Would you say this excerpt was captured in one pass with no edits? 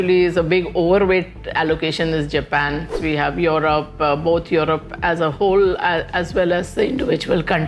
no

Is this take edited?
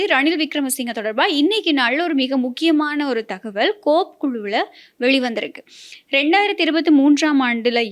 no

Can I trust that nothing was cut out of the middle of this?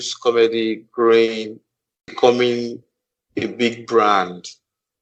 yes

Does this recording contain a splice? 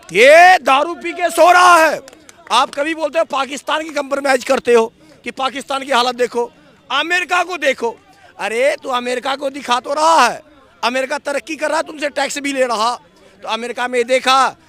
no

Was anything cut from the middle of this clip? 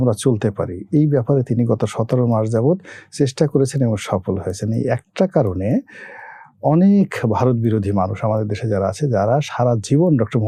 no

